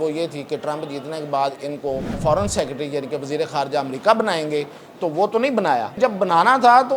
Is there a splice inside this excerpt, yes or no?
yes